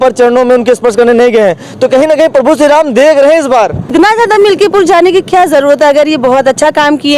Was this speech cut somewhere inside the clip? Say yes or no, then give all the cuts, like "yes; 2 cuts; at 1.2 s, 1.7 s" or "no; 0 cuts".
yes; 1 cut; at 3.9 s